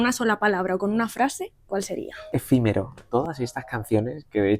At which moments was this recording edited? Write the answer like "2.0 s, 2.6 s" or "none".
2.2 s, 3.0 s